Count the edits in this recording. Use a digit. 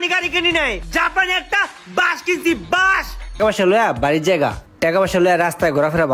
2